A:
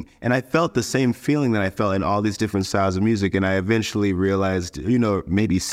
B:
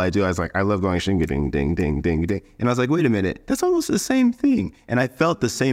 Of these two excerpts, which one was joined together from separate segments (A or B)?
B